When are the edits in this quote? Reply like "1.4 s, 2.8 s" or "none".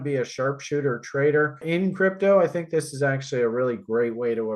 1.6 s